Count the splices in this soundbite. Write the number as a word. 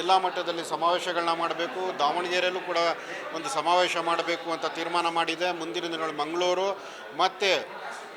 zero